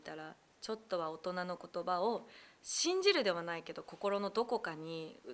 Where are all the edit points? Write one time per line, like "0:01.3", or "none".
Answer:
none